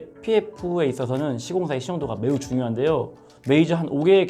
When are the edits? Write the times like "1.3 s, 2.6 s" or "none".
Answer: 3.3 s